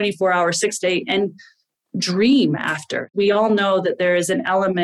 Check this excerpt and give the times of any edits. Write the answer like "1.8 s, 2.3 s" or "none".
3.1 s